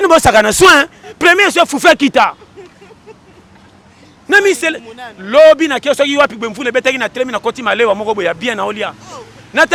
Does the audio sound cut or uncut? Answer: uncut